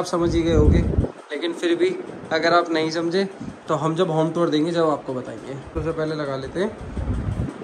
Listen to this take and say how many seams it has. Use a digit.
0